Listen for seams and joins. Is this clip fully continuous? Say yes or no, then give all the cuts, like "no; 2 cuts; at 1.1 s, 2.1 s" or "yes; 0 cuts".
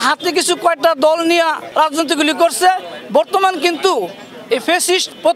no; 1 cut; at 1.6 s